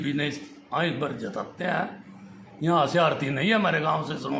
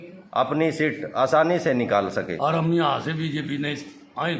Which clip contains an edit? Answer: second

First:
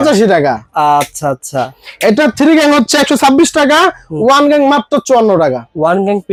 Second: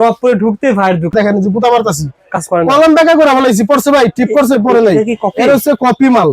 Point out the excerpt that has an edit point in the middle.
second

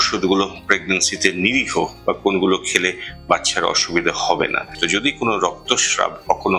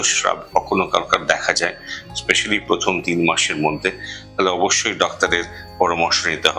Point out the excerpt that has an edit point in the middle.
first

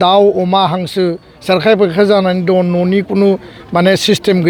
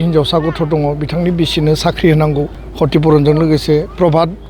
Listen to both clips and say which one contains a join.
second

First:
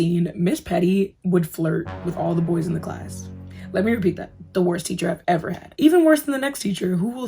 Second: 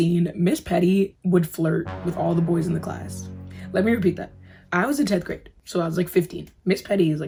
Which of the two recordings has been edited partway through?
first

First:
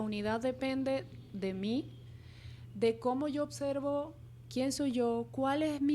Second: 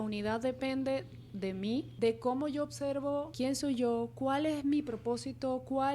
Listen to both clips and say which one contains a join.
second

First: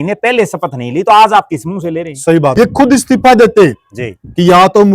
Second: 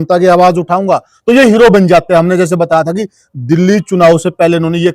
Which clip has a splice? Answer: first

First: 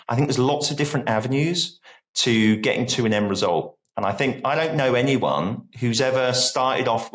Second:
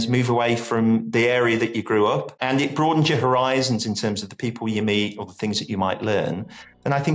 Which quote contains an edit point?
second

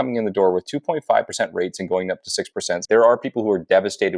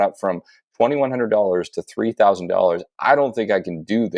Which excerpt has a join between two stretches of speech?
first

